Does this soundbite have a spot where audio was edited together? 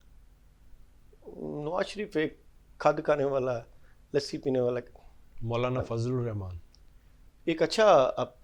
no; 0 cuts

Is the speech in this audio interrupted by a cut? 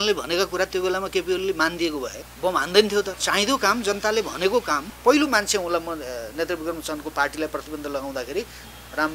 yes; 3 cuts; at 2.2 s, 3.2 s, 4.9 s

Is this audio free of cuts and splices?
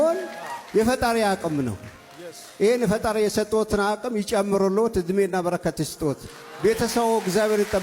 yes; 0 cuts

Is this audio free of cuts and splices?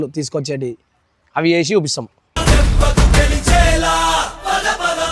yes; 0 cuts

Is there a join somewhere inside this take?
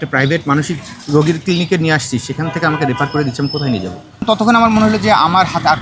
yes; 2 cuts; at 0.9 s, 4.2 s

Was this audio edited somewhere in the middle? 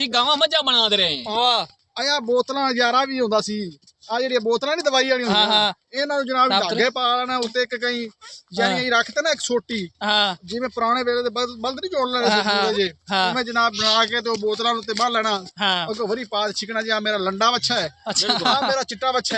no; 0 cuts

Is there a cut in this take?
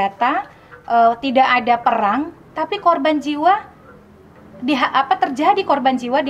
no; 0 cuts

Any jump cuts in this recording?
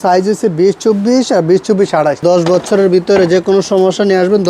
yes; 1 cut; at 2.2 s

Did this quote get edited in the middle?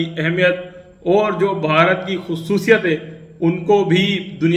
no; 0 cuts

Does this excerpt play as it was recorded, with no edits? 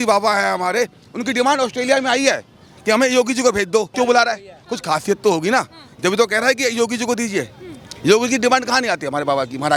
yes; 0 cuts

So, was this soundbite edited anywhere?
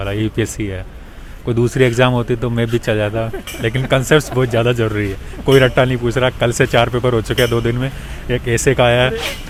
no; 0 cuts

